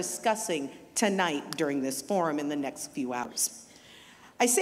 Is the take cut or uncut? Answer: cut